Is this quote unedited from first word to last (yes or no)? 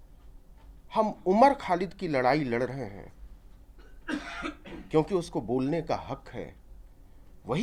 yes